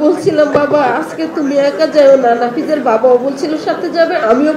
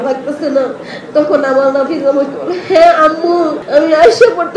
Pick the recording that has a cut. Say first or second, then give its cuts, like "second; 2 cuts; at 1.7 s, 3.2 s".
second; 1 cut; at 3.6 s